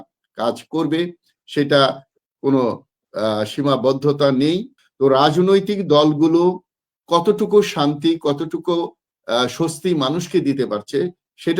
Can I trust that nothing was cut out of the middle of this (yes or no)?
no